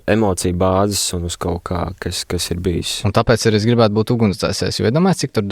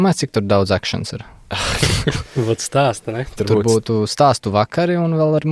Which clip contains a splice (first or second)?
first